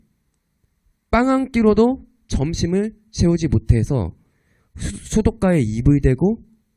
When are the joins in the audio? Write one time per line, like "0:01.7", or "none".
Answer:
0:04.1